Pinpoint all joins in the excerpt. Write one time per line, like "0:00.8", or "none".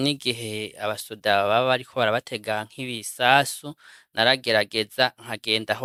none